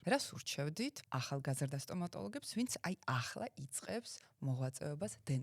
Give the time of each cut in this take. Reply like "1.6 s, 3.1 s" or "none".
1.0 s